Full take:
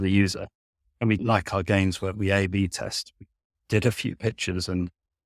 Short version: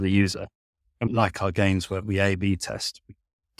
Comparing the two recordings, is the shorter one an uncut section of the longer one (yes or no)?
no